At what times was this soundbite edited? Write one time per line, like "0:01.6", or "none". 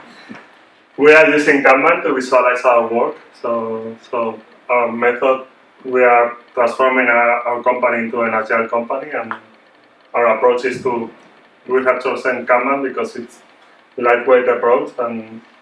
0:13.8